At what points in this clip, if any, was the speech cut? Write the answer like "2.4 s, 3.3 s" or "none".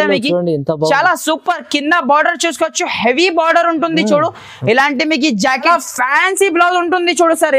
5.6 s